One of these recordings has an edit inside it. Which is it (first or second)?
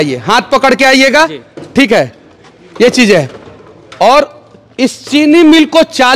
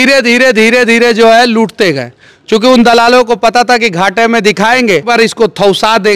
second